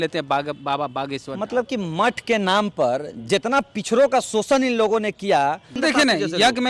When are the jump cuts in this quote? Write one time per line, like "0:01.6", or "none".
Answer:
0:05.8